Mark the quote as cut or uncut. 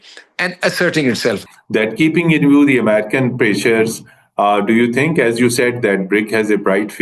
cut